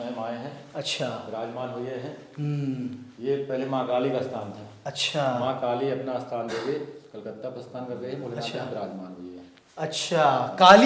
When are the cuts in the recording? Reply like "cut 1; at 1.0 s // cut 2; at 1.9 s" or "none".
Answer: none